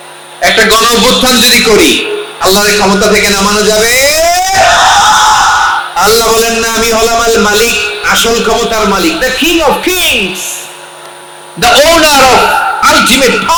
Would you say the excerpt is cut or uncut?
uncut